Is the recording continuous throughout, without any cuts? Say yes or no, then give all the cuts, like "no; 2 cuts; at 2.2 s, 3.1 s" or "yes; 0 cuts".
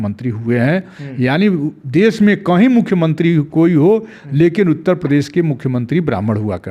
yes; 0 cuts